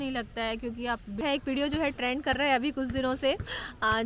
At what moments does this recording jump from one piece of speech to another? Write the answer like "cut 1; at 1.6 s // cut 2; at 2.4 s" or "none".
cut 1; at 0.9 s